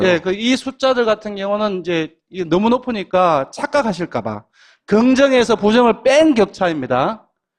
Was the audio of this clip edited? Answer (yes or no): no